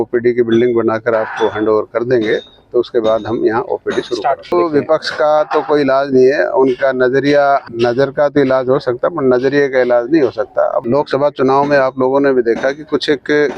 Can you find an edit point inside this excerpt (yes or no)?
yes